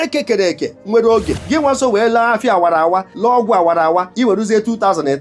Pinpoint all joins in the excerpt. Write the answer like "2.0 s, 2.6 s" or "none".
1.4 s, 3.1 s, 4.1 s